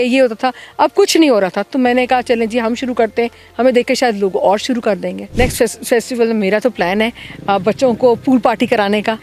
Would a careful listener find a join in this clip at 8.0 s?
no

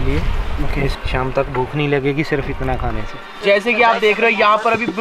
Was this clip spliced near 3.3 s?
yes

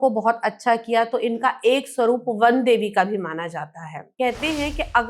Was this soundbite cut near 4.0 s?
yes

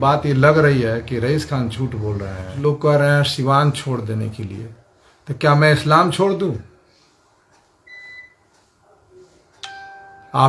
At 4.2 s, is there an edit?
no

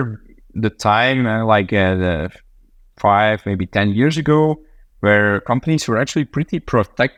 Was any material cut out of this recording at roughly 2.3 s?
no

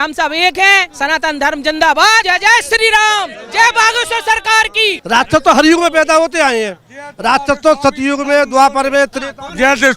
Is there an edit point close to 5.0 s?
yes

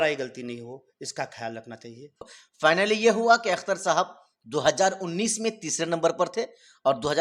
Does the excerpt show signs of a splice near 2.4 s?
yes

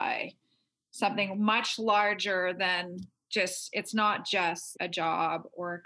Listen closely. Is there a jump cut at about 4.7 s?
yes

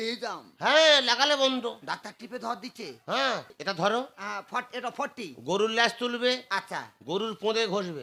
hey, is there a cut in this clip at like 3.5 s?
yes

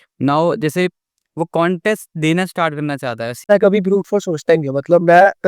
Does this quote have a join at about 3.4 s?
yes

